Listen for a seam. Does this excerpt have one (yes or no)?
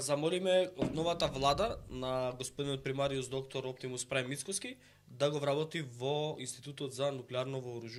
no